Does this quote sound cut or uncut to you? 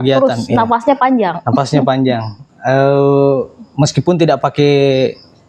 uncut